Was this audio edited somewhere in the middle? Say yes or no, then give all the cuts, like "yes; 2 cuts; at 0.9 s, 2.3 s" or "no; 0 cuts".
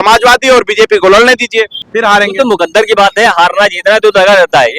yes; 1 cut; at 1.8 s